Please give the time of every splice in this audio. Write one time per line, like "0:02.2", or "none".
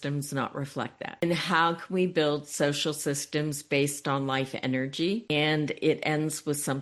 0:01.1
0:05.3